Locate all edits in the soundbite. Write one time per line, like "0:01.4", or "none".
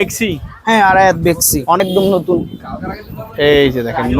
0:01.8